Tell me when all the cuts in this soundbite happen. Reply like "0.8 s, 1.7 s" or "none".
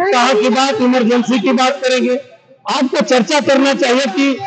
none